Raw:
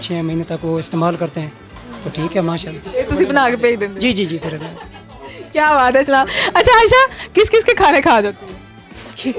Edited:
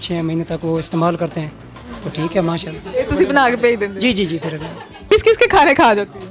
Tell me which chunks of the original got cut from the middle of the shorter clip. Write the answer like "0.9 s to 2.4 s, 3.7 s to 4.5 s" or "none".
4.9 s to 7.2 s